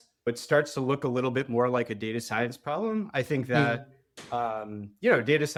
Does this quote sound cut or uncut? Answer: uncut